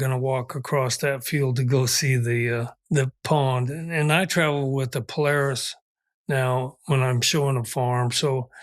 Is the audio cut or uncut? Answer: cut